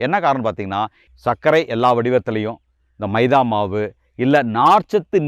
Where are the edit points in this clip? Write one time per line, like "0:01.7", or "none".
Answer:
0:01.0